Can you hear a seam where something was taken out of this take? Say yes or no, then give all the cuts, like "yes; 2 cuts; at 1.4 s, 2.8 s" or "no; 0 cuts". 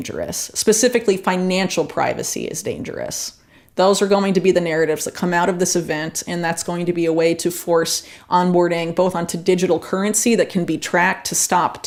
no; 0 cuts